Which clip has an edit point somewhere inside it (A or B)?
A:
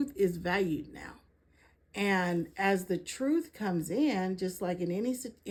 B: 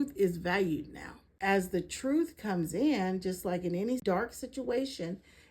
B